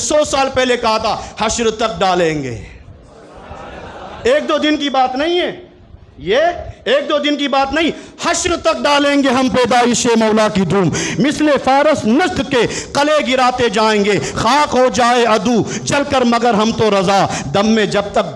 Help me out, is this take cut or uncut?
uncut